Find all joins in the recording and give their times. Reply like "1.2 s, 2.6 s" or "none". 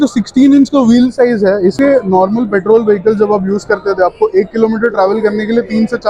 1.8 s

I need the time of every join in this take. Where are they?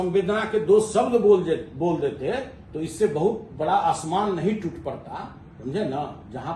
none

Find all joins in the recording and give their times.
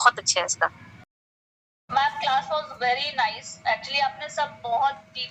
none

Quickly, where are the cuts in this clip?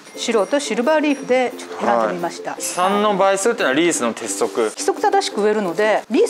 2.5 s, 4.8 s

